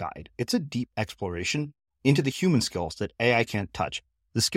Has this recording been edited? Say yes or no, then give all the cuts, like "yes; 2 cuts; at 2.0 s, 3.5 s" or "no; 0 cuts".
no; 0 cuts